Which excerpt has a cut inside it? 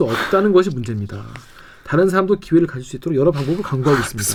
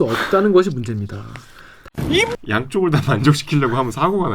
second; 1 cut; at 1.9 s

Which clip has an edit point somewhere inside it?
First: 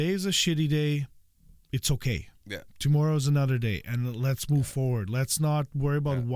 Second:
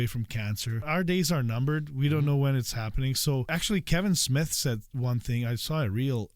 second; 2 cuts; at 0.8 s, 3.5 s

